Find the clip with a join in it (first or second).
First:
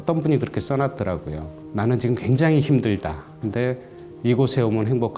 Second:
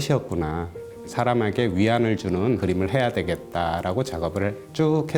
second